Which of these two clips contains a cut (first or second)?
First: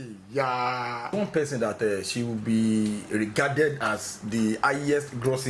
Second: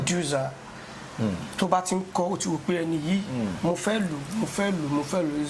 first